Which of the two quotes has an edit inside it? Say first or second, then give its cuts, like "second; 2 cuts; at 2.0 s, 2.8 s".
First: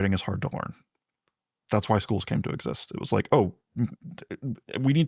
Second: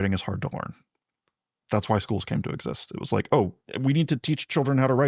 second; 1 cut; at 3.6 s